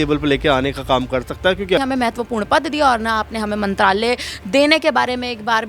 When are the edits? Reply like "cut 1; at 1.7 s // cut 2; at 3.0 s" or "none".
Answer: cut 1; at 1.8 s